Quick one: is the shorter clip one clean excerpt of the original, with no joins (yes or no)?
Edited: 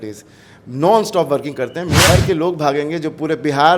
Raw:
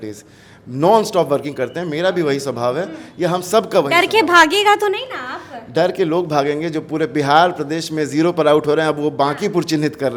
no